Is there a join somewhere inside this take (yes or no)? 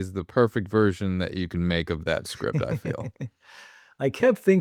no